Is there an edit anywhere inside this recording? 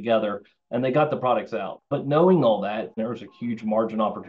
yes; 2 cuts; at 1.8 s, 2.9 s

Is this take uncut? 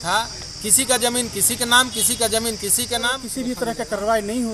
no; 1 cut; at 3.2 s

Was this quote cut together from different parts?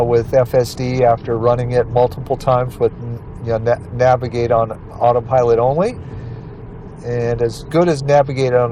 no; 0 cuts

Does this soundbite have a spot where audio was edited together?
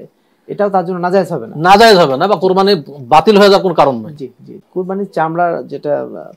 no; 0 cuts

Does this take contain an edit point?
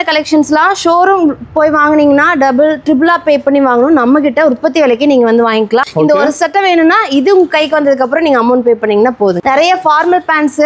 yes; 2 cuts; at 5.8 s, 9.4 s

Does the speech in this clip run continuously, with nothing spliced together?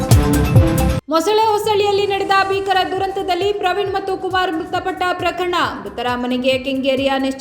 no; 1 cut; at 1.0 s

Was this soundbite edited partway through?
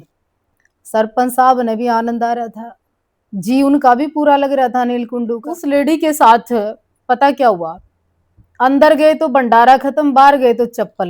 yes; 1 cut; at 5.5 s

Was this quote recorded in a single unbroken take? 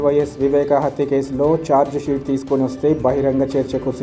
yes; 0 cuts

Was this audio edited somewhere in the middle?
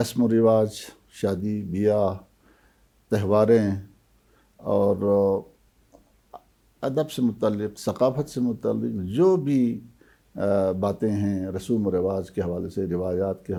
no; 0 cuts

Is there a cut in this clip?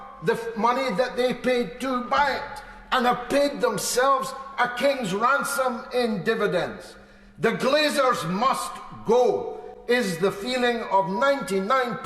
no; 0 cuts

